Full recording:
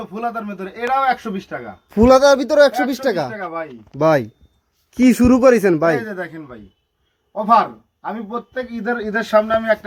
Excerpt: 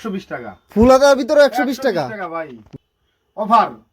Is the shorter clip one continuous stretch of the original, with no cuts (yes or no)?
no